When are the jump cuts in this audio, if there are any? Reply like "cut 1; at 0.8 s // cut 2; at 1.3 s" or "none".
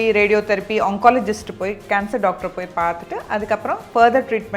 none